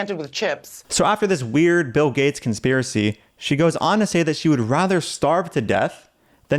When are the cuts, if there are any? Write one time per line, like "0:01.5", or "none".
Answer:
0:00.9